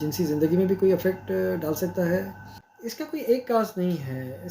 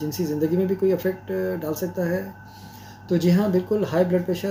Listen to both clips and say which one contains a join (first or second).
first